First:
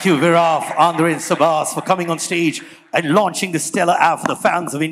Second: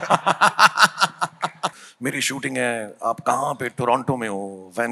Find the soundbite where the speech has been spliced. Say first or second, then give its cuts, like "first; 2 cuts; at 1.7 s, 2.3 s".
second; 1 cut; at 1.8 s